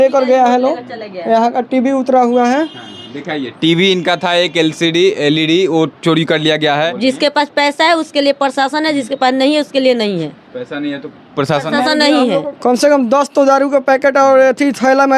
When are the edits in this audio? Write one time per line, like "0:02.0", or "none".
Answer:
0:06.9
0:12.5

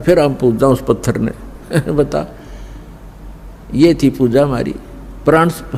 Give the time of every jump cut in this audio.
none

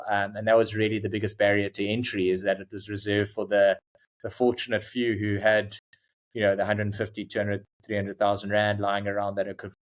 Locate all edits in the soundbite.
none

